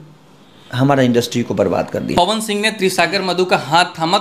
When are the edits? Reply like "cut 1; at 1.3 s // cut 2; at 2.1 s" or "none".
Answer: cut 1; at 2.1 s